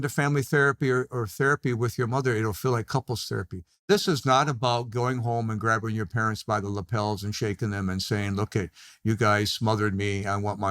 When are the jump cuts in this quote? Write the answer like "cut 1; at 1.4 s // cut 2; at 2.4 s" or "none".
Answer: cut 1; at 3.9 s